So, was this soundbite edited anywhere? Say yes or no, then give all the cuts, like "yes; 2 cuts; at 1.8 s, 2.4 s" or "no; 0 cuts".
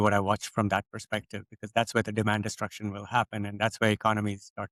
no; 0 cuts